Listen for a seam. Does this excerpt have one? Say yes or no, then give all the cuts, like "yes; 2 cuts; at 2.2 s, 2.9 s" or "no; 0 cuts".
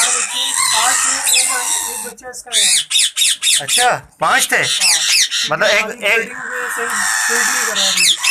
no; 0 cuts